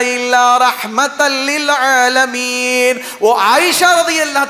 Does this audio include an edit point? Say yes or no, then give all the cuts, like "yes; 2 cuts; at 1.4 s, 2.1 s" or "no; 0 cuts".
no; 0 cuts